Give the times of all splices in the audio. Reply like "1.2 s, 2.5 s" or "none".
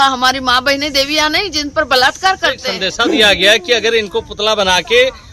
2.7 s